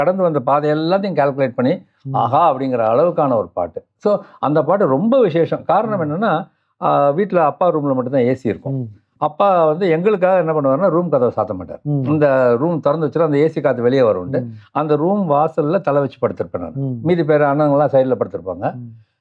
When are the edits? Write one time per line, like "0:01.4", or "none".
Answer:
none